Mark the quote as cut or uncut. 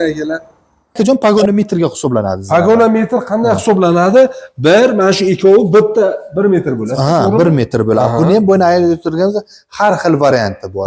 cut